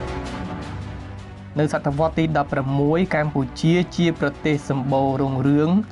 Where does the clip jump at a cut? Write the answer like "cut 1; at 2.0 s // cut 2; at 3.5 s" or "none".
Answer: cut 1; at 1.4 s